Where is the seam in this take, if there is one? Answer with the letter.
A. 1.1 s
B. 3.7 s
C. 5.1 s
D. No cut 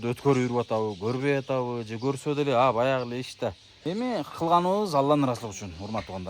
B